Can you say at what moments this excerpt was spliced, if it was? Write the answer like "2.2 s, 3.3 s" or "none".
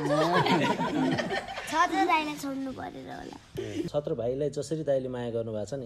3.9 s